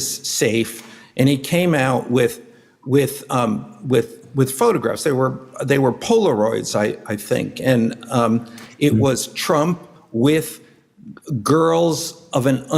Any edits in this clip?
yes; 2 cuts; at 8.6 s, 10.0 s

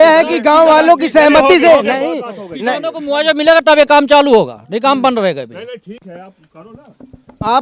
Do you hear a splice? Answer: no; 0 cuts

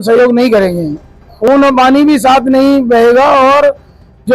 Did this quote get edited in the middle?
yes; 1 cut; at 1.5 s

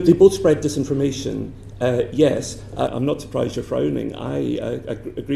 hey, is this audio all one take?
no; 1 cut; at 2.9 s

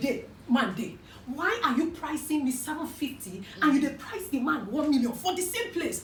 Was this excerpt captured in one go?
yes; 0 cuts

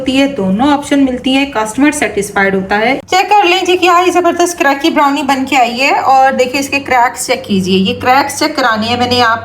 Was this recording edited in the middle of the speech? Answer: yes; 1 cut; at 3.0 s

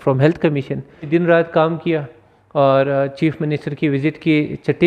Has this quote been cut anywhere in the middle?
yes; 1 cut; at 1.1 s

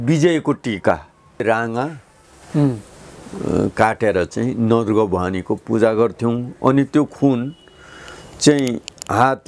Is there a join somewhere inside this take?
yes; 1 cut; at 1.4 s

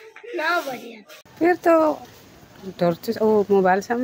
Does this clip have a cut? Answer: yes; 1 cut; at 1.2 s

